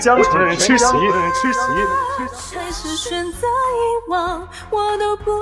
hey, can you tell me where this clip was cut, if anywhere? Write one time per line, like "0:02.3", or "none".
none